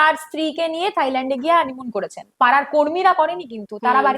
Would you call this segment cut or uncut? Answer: cut